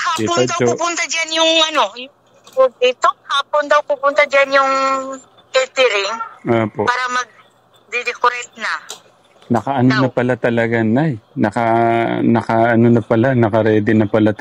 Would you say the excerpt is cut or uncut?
cut